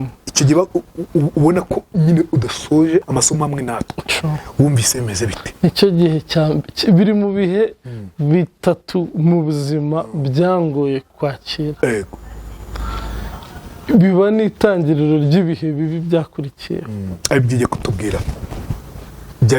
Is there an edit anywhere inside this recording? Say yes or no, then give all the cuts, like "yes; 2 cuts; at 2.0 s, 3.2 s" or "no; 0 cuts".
yes; 1 cut; at 3.1 s